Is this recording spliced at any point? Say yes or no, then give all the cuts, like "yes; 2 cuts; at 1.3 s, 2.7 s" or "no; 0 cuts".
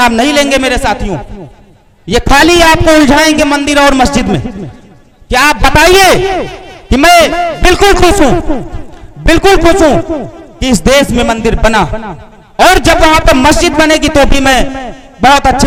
no; 0 cuts